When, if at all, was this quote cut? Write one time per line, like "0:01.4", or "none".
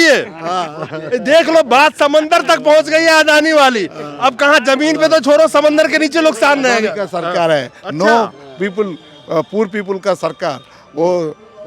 none